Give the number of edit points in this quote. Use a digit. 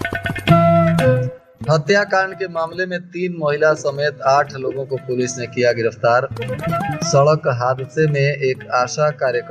1